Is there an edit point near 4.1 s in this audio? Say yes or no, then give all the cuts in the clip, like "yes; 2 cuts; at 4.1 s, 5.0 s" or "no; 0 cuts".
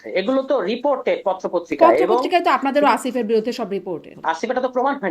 yes; 1 cut; at 4.1 s